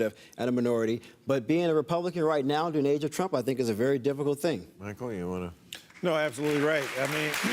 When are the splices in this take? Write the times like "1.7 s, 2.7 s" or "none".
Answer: 4.6 s